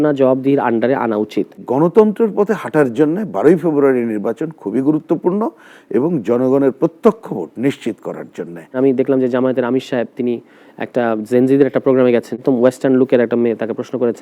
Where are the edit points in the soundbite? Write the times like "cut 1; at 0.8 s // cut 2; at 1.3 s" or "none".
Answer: cut 1; at 1.7 s // cut 2; at 8.8 s // cut 3; at 12.3 s